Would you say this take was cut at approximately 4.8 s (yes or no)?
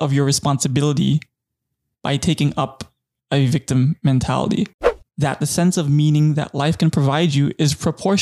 yes